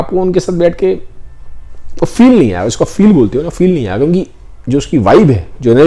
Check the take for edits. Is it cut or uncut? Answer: uncut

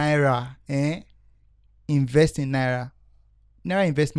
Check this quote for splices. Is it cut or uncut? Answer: uncut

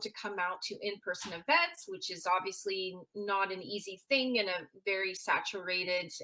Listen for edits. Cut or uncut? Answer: uncut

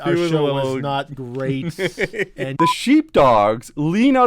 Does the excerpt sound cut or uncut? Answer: cut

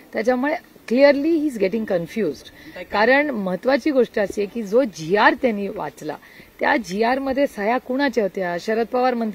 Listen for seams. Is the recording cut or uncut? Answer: uncut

